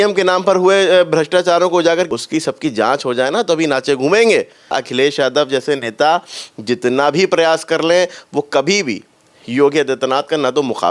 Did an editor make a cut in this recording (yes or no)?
yes